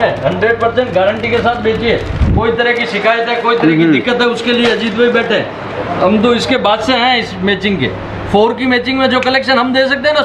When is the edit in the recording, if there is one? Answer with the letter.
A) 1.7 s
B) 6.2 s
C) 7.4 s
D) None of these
D